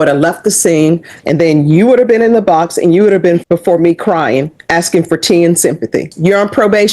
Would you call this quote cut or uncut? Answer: cut